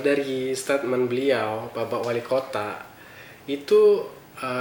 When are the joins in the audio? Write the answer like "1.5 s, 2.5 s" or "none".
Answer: none